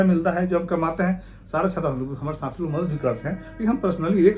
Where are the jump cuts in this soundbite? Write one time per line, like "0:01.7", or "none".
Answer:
none